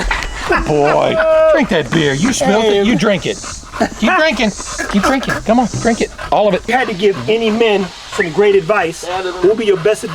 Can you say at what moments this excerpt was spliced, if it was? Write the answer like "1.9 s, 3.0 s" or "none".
6.7 s

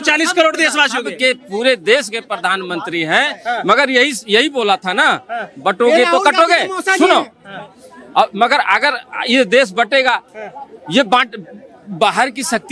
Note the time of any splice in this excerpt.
none

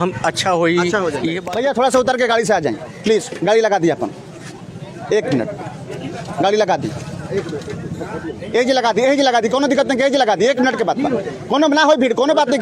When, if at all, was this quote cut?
1.4 s

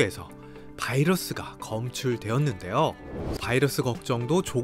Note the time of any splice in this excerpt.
3.3 s

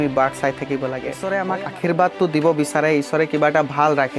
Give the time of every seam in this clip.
1.5 s

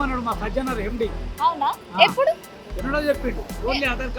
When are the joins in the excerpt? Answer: none

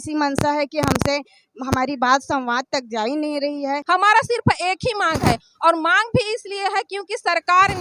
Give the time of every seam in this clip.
3.8 s

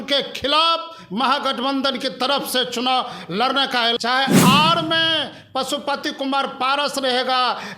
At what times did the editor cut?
4.0 s

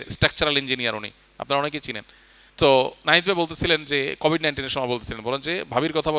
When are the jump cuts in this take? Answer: none

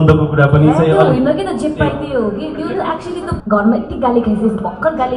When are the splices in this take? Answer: 3.3 s

